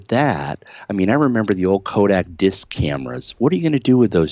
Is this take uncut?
yes; 0 cuts

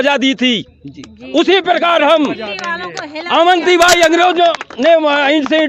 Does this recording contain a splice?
no; 0 cuts

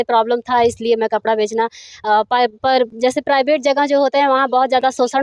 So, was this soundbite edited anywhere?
no; 0 cuts

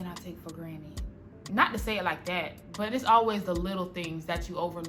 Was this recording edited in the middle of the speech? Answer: no; 0 cuts

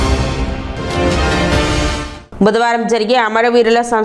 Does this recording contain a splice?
yes; 1 cut; at 2.1 s

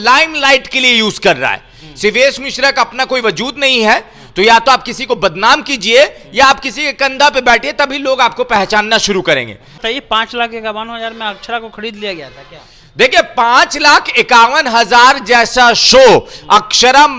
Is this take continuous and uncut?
no; 1 cut; at 9.7 s

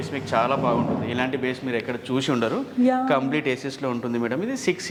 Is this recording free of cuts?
yes; 0 cuts

